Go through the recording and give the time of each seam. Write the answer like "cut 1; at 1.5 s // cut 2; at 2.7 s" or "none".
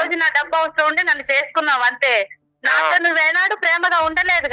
none